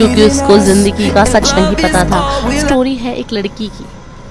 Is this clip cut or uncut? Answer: cut